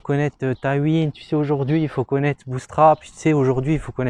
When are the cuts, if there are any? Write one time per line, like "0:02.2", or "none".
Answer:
none